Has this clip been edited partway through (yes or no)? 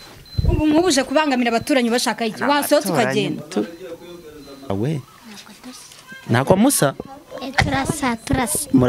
yes